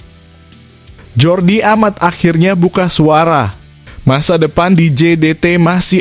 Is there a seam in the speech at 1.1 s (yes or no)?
yes